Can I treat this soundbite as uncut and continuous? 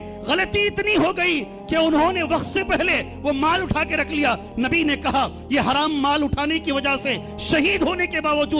yes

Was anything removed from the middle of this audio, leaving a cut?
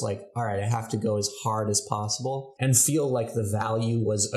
yes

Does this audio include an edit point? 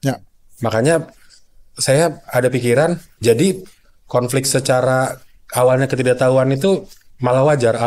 yes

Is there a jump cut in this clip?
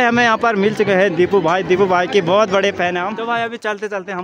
yes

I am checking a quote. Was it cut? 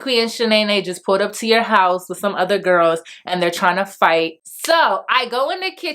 yes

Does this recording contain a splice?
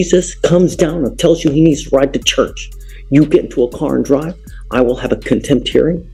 no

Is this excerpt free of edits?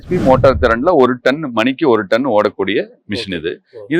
yes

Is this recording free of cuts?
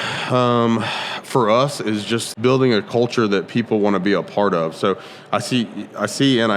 no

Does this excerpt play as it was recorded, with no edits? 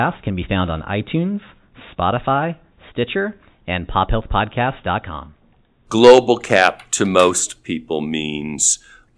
no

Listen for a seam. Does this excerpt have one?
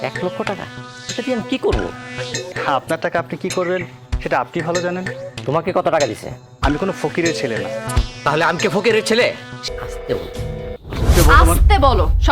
yes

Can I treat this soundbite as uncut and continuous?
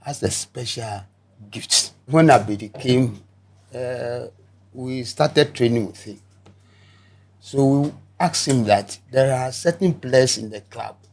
no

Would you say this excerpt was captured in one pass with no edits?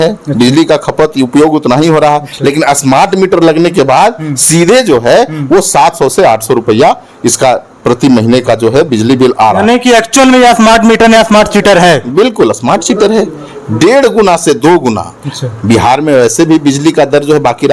yes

